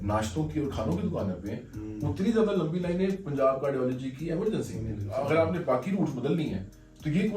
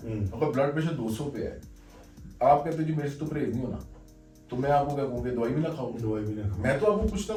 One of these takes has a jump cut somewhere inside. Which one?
first; 1 cut; at 5.0 s

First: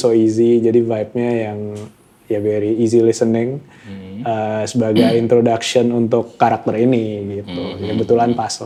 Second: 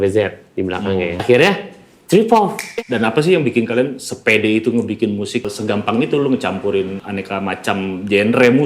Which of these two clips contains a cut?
second; 4 cuts; at 1.2 s, 2.6 s, 5.4 s, 7.0 s

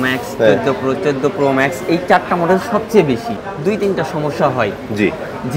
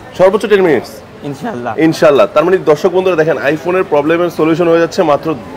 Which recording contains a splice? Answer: first; 1 cut; at 3.3 s

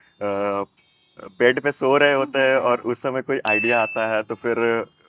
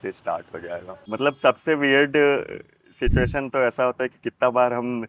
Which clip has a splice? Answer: second; 1 cut; at 0.9 s

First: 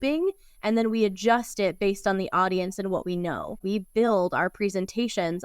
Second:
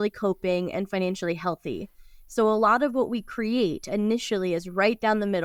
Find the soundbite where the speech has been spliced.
first; 1 cut; at 3.6 s

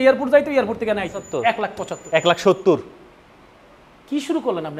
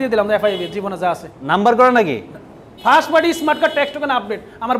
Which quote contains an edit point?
first; 1 cut; at 1.2 s

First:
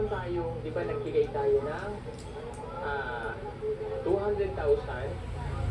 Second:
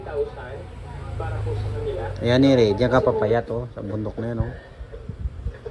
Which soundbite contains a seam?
second; 1 cut; at 2.1 s

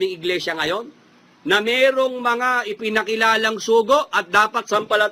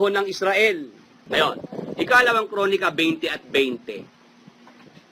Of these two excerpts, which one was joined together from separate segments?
second; 1 cut; at 1.1 s

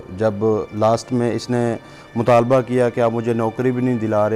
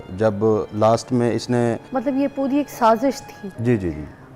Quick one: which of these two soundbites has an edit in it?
second; 1 cut; at 1.8 s

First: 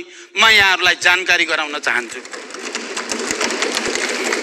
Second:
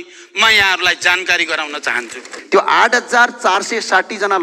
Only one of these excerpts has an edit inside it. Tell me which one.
second; 1 cut; at 2.3 s

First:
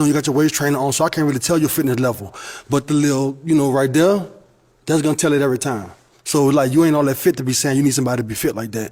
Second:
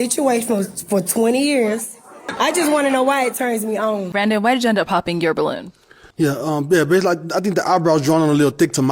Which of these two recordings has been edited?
second; 2 cuts; at 2.3 s, 4.1 s

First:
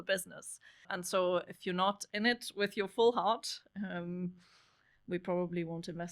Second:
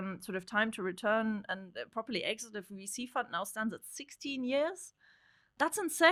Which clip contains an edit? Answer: first; 1 cut; at 0.9 s

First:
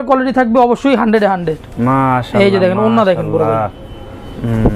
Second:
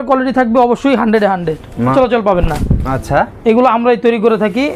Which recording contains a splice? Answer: second; 1 cut; at 1.9 s

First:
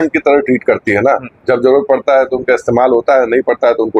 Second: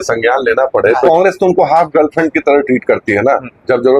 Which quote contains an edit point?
second; 1 cut; at 1.0 s

